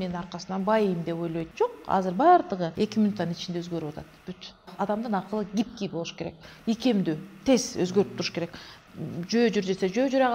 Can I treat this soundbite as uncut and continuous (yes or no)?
no